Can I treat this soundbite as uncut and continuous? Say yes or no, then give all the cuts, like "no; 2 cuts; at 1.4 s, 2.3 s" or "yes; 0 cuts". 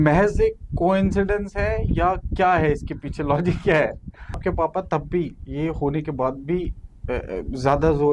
no; 1 cut; at 4.4 s